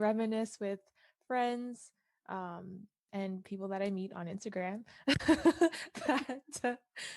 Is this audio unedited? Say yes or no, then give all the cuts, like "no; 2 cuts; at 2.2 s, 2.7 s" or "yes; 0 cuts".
no; 1 cut; at 2.9 s